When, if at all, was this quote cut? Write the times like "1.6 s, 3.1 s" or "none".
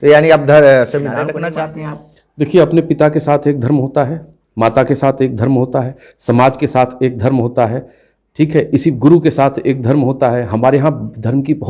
1.3 s